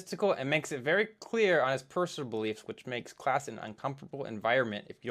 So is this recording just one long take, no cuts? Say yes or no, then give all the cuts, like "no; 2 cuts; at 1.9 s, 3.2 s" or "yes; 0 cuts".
yes; 0 cuts